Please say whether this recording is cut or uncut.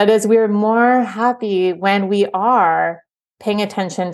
uncut